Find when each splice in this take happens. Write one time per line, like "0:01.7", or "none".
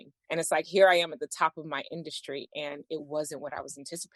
none